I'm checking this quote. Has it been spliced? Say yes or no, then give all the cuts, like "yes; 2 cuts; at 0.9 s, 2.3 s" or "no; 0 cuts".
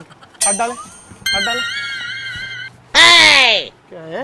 no; 0 cuts